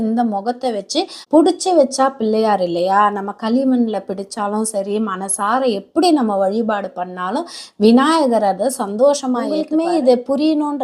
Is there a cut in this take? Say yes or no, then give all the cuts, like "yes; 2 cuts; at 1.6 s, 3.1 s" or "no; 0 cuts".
yes; 2 cuts; at 1.2 s, 9.6 s